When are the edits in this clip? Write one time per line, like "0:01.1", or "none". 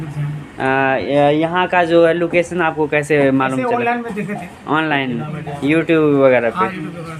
none